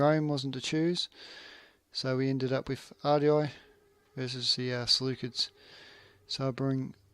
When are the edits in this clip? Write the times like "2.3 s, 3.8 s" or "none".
1.8 s